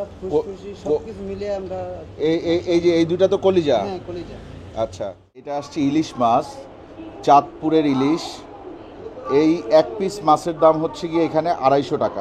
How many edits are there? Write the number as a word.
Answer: one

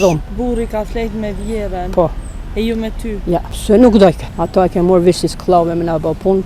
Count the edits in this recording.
two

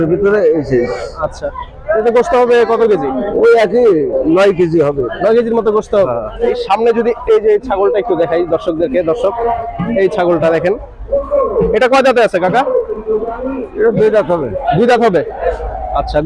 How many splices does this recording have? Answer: one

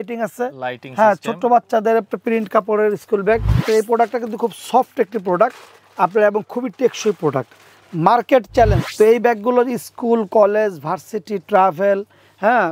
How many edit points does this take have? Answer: two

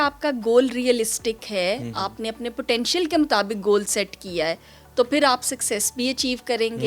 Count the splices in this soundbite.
zero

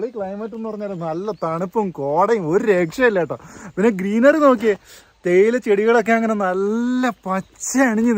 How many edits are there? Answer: zero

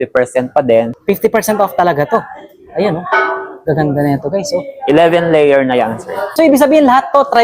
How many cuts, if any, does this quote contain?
two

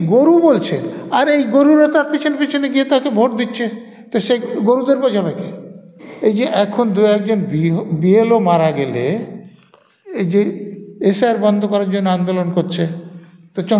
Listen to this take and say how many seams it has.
one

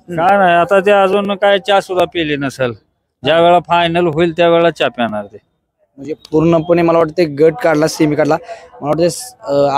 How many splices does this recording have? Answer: zero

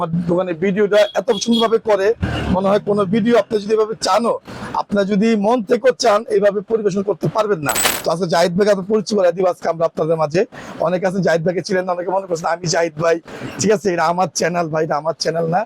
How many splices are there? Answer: one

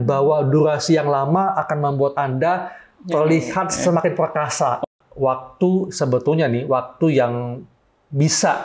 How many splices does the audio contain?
one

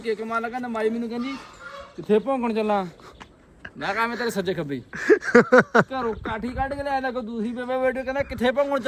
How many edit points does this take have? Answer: zero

